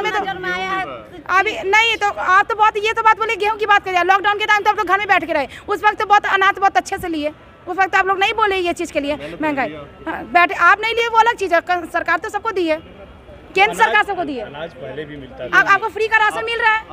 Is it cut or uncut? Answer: cut